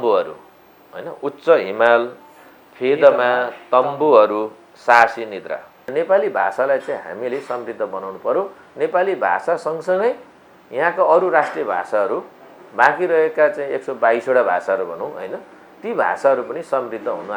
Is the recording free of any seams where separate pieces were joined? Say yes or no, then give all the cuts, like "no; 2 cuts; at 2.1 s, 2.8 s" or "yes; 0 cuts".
no; 1 cut; at 5.8 s